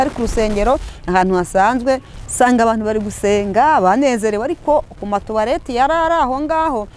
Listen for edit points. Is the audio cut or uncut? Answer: cut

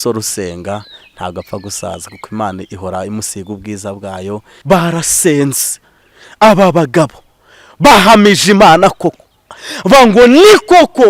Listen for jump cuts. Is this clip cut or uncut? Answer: cut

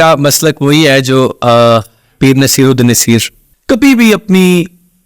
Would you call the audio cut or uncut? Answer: cut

